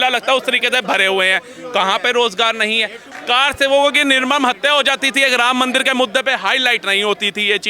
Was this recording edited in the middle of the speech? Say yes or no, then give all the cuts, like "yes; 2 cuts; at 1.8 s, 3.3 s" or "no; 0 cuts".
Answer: yes; 1 cut; at 3.1 s